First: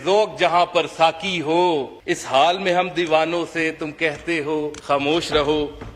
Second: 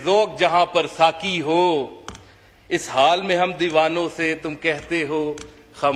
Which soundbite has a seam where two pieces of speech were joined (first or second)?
first